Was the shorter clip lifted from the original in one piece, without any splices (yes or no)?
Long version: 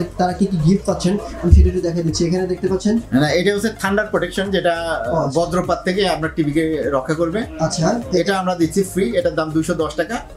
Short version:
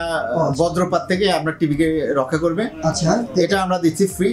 yes